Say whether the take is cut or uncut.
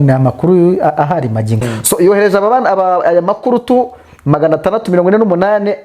cut